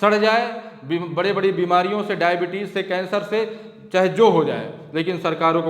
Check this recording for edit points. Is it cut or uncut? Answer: uncut